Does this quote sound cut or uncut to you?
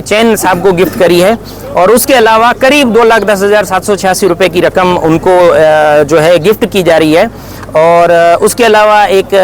uncut